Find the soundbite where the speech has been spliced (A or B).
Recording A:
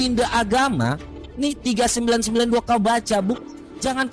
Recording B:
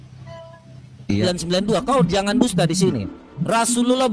B